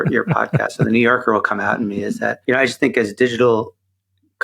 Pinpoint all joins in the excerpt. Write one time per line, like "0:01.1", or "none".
0:02.4